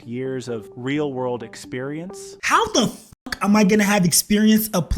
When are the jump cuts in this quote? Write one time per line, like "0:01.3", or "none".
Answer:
0:02.3